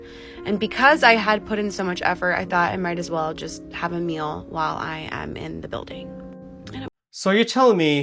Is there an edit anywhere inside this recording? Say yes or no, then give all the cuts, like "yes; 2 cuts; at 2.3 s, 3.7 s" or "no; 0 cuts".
no; 0 cuts